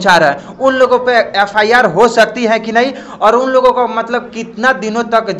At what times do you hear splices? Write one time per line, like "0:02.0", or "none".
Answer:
none